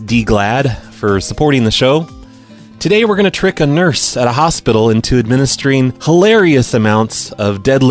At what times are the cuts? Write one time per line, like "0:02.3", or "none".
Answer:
0:04.9